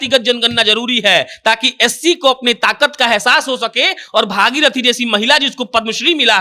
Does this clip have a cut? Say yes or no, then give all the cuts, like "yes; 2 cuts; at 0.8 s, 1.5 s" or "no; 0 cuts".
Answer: no; 0 cuts